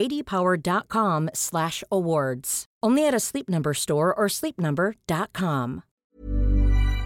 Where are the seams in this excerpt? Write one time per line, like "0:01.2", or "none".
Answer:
0:06.0